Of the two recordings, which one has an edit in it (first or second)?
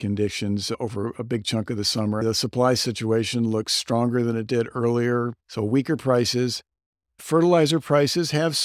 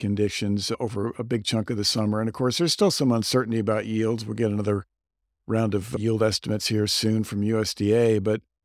first